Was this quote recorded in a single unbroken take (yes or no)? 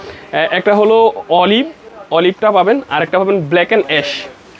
yes